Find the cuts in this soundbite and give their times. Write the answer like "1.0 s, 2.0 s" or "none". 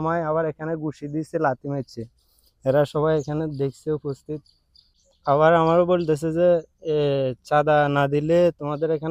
none